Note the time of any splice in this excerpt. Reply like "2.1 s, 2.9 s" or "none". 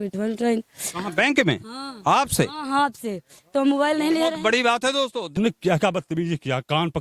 5.3 s